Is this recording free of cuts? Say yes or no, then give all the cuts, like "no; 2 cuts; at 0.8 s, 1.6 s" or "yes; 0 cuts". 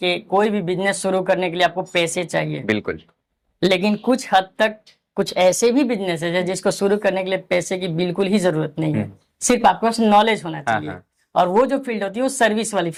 yes; 0 cuts